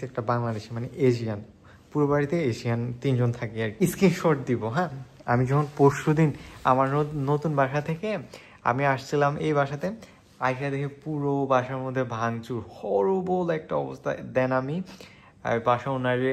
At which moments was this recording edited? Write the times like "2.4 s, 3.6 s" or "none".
3.7 s